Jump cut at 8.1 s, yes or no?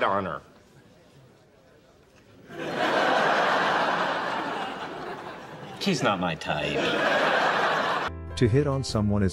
no